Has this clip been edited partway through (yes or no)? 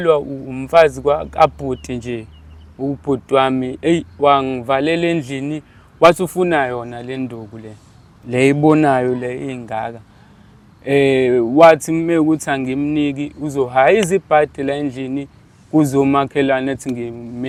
no